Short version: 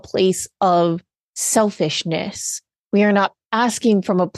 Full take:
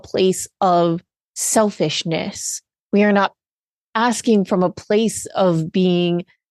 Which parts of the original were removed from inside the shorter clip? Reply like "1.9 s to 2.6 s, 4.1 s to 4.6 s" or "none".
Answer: 3.4 s to 3.8 s